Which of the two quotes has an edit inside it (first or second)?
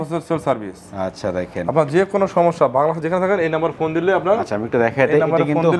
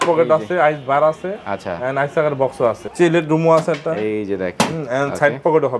second